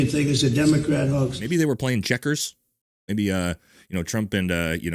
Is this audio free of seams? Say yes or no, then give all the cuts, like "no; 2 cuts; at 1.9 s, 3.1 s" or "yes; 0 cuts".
no; 1 cut; at 1.4 s